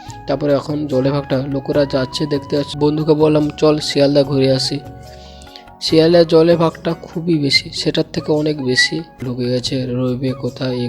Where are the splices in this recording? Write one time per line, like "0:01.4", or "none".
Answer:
0:02.7
0:09.2